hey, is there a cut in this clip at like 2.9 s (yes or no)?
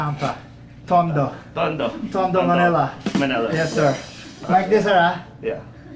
no